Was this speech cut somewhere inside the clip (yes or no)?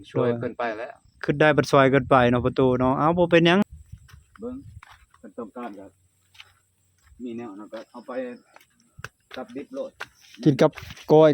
yes